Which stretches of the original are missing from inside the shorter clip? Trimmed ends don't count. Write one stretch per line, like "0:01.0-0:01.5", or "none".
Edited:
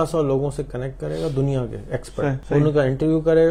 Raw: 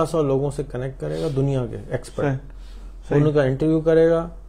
0:02.4-0:03.0